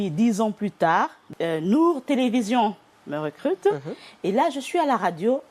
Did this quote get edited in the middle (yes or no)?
yes